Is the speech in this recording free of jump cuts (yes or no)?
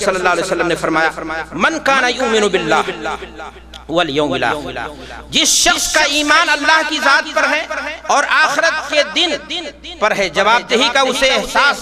yes